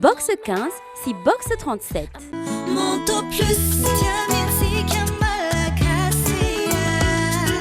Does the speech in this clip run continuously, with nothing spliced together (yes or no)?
no